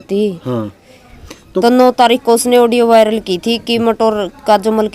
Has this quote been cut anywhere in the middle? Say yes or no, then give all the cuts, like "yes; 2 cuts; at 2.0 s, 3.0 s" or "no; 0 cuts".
yes; 1 cut; at 1.5 s